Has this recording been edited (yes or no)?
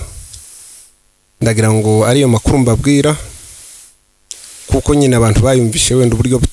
no